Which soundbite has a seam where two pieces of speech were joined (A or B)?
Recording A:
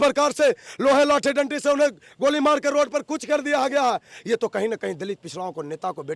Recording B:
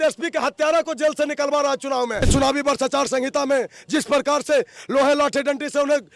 B